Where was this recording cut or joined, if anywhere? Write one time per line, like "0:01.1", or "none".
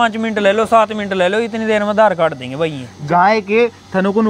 0:02.9

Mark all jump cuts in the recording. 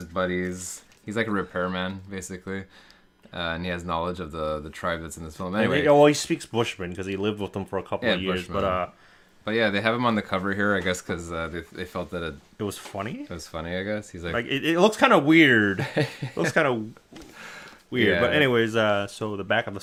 none

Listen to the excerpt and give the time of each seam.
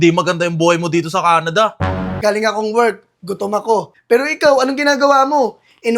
0:02.1
0:03.9

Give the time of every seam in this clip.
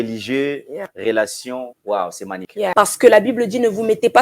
0:01.7
0:02.5

